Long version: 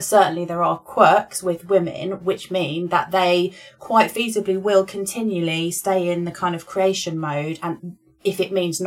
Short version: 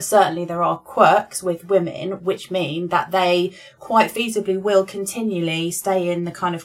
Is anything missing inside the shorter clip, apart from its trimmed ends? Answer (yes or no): no